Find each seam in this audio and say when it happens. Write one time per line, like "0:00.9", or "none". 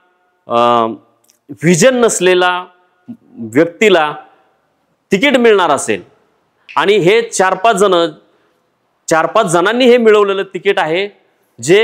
none